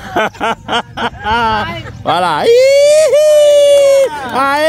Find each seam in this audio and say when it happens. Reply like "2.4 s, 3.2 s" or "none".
none

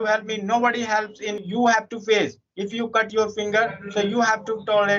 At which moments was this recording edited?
1.5 s

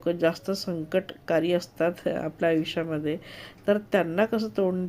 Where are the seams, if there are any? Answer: none

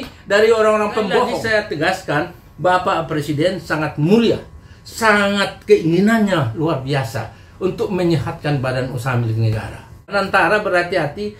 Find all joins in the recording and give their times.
1.3 s, 10.1 s

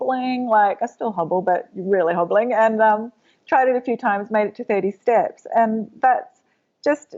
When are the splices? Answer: none

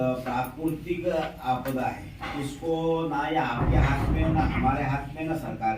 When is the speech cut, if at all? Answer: none

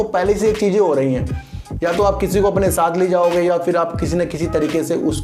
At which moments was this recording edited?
none

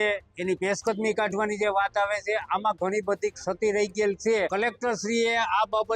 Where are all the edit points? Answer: 4.5 s

